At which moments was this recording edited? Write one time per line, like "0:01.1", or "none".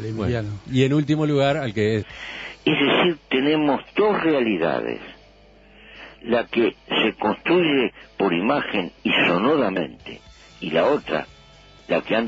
none

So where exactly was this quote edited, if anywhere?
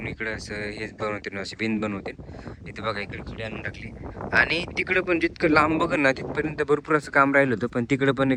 none

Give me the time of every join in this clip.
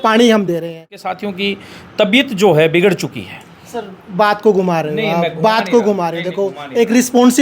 0:01.1

